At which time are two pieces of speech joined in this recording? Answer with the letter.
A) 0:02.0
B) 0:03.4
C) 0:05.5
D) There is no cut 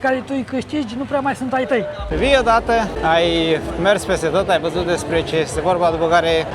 A